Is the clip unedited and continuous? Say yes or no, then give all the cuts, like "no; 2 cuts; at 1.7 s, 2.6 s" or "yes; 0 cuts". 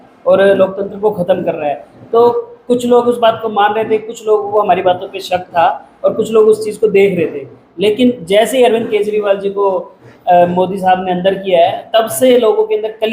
yes; 0 cuts